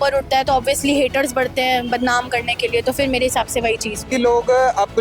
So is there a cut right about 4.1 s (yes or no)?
yes